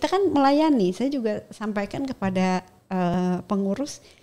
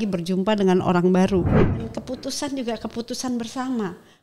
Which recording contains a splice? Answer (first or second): second